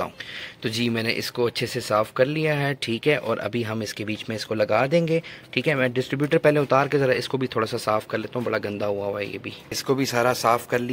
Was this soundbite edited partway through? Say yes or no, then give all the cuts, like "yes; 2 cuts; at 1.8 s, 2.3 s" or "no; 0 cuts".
no; 0 cuts